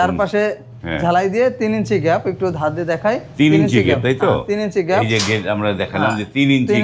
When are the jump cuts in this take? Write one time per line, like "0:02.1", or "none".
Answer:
none